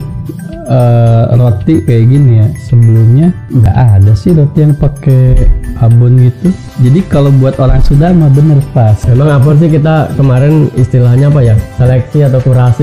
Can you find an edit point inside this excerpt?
yes; 3 cuts; at 3.6 s, 6.7 s, 9.0 s

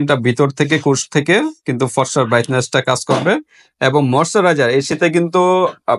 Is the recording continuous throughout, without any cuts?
yes; 0 cuts

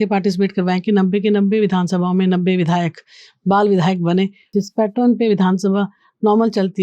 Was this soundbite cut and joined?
yes; 1 cut; at 4.5 s

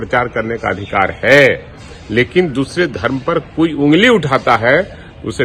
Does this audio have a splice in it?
no; 0 cuts

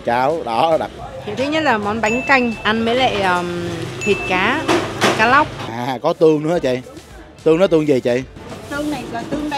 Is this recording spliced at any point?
yes; 2 cuts; at 0.9 s, 5.6 s

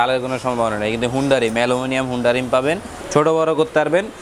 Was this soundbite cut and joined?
yes; 1 cut; at 2.9 s

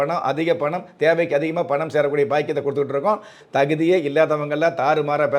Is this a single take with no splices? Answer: no; 1 cut; at 3.4 s

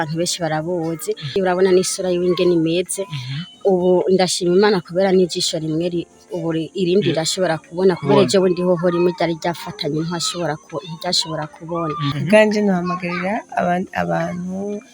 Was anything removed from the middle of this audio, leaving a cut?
yes; 2 cuts; at 1.2 s, 12.2 s

